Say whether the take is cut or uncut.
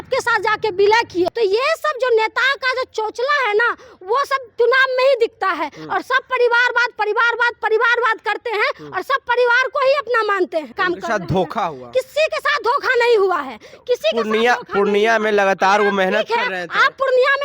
cut